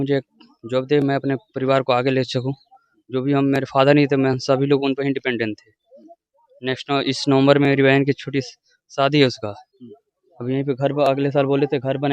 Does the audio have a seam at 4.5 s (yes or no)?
no